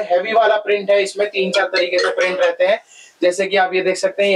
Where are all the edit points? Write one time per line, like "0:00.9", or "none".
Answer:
none

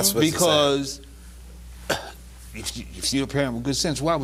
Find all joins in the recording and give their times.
none

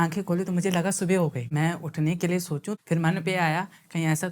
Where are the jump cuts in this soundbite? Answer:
0:01.4
0:02.8

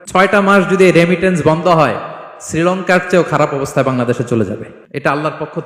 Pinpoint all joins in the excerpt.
0:04.4

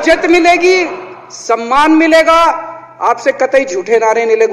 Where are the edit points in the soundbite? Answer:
none

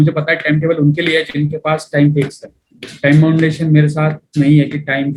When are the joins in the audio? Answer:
none

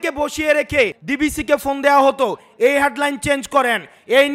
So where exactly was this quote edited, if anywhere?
0:01.0

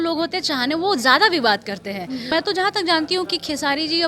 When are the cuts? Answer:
0:02.3

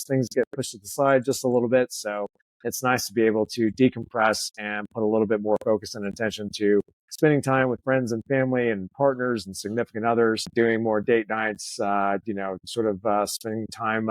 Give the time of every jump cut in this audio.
0:10.5

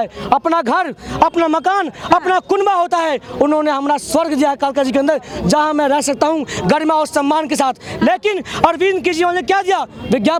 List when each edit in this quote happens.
none

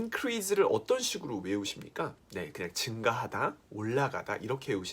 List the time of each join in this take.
0:02.2

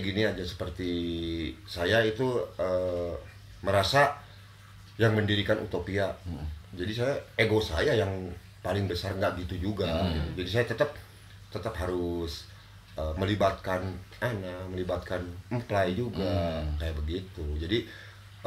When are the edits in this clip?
none

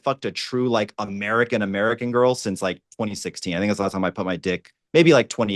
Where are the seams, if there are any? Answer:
none

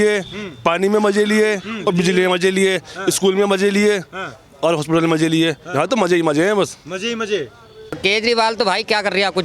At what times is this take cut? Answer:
0:08.0

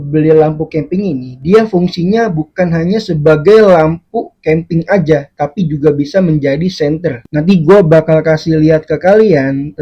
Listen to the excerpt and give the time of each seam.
0:07.2

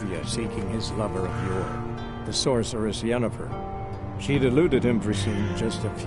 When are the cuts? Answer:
0:05.2

